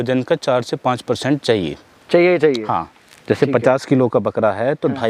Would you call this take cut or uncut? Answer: uncut